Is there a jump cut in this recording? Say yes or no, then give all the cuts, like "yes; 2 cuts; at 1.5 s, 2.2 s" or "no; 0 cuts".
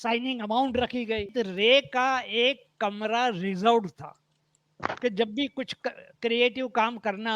yes; 1 cut; at 1.3 s